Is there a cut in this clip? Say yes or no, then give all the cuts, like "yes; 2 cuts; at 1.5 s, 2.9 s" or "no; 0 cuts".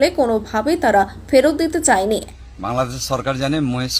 yes; 1 cut; at 2.2 s